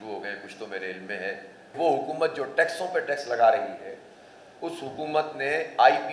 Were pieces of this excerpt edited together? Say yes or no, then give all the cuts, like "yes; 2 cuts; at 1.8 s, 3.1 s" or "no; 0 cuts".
yes; 1 cut; at 1.7 s